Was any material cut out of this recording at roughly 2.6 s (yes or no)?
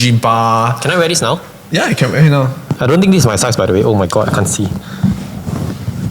yes